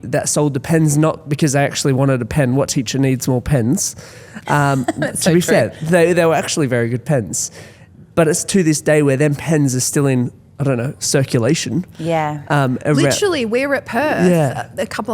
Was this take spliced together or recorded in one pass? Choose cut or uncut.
uncut